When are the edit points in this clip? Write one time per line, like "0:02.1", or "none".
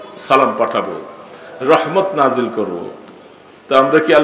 none